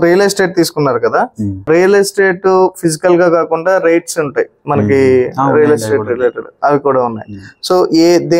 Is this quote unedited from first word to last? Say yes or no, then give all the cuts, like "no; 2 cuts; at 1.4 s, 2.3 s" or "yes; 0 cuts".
yes; 0 cuts